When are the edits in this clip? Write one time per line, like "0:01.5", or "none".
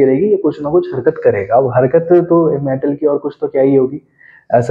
none